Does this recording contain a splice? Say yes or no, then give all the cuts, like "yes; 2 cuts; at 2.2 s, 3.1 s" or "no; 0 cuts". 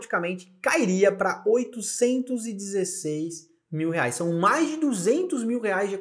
no; 0 cuts